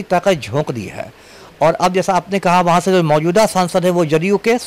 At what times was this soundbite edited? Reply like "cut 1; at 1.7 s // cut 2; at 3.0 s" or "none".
none